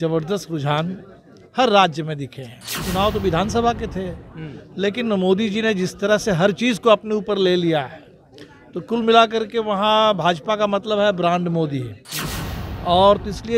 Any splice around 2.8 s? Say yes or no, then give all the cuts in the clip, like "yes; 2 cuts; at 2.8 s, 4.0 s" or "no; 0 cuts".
yes; 1 cut; at 2.8 s